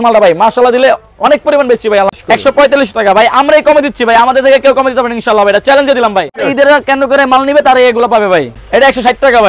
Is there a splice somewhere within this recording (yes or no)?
yes